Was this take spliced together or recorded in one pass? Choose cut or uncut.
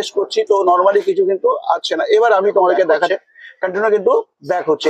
cut